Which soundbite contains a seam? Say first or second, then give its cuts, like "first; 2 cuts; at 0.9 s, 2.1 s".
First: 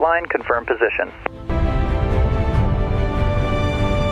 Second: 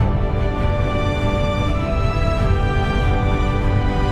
first; 1 cut; at 1.4 s